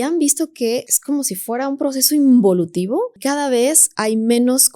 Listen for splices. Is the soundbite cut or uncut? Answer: cut